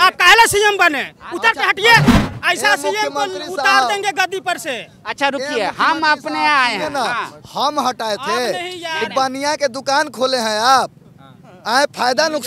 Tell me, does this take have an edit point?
yes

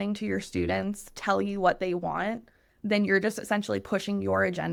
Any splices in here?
no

